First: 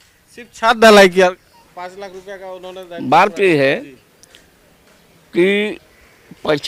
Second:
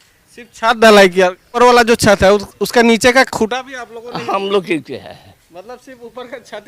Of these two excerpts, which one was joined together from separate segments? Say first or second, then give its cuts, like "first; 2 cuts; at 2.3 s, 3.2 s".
second; 1 cut; at 1.6 s